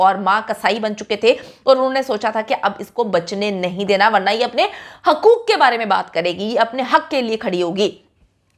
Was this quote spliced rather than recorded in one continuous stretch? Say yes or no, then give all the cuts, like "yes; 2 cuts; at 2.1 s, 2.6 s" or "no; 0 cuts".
no; 0 cuts